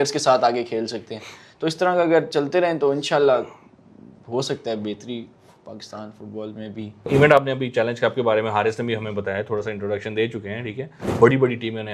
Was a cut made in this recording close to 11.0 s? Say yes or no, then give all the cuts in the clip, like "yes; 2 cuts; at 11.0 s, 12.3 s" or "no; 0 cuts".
yes; 2 cuts; at 7.1 s, 11.0 s